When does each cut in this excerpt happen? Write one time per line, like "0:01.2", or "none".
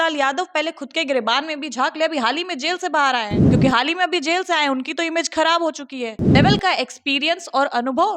0:03.4
0:06.3